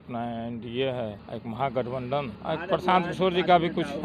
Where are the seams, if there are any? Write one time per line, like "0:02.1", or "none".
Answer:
0:01.3
0:02.3